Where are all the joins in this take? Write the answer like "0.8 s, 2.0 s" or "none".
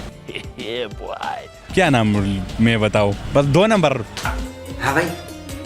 1.7 s, 3.2 s